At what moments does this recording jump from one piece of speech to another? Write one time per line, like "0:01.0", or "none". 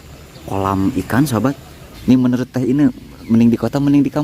0:01.9